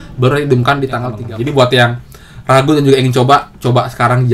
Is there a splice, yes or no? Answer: yes